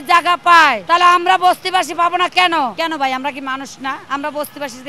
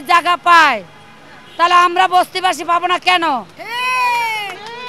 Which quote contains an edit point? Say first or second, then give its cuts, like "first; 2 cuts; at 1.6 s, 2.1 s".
first; 3 cuts; at 0.8 s, 2.7 s, 4.0 s